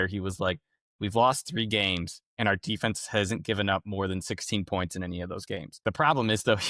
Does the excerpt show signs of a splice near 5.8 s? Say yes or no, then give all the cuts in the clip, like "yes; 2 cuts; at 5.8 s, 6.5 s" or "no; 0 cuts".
yes; 1 cut; at 5.8 s